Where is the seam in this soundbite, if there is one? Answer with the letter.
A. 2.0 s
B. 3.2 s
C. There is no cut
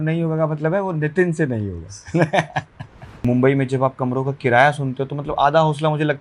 B